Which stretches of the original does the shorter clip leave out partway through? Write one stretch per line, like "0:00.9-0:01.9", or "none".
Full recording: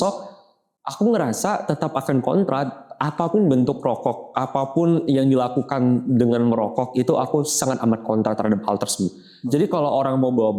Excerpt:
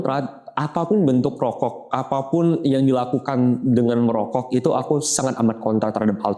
none